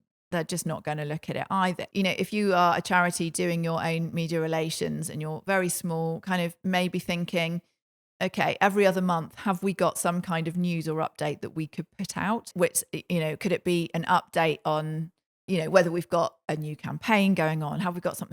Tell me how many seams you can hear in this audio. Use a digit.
1